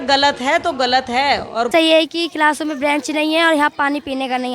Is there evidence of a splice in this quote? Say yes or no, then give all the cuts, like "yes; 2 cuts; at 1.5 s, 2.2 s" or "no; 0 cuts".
yes; 1 cut; at 1.7 s